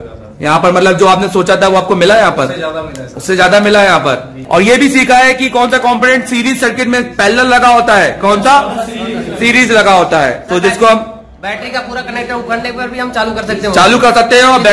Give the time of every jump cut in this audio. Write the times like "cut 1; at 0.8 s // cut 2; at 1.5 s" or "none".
cut 1; at 4.3 s